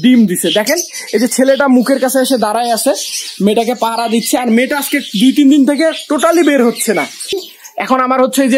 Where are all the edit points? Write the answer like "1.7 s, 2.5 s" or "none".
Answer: 7.5 s